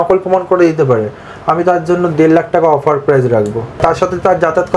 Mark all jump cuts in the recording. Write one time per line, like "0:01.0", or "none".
0:03.8